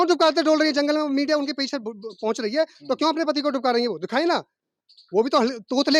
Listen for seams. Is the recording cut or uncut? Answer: uncut